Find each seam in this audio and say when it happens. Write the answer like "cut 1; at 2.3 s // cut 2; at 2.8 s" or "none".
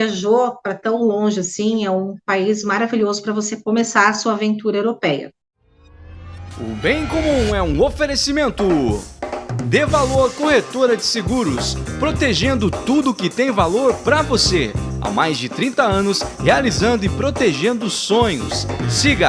cut 1; at 5.4 s